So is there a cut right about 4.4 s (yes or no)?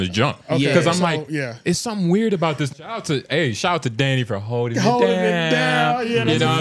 no